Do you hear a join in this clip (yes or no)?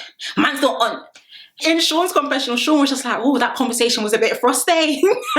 yes